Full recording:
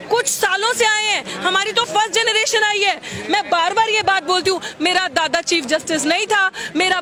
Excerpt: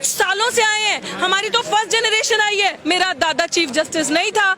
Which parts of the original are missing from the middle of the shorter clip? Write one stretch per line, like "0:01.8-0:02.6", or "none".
0:03.0-0:04.7